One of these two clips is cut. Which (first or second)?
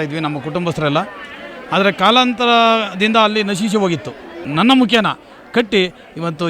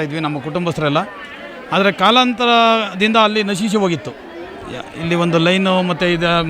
first